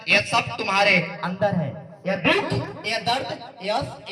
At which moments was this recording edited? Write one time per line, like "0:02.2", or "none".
none